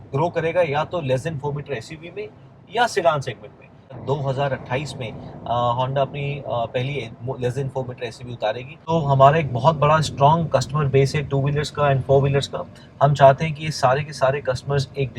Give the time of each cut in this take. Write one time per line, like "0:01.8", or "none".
0:04.0
0:08.7